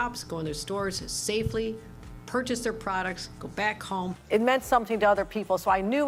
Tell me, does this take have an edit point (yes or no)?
no